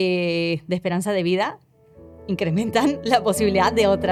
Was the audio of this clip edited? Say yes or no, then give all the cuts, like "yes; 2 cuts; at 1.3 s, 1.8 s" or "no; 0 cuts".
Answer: no; 0 cuts